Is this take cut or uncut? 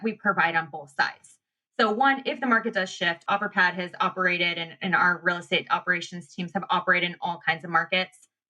cut